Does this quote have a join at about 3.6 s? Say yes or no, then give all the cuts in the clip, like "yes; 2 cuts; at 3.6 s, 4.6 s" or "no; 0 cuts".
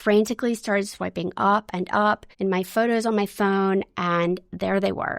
no; 1 cut; at 2.3 s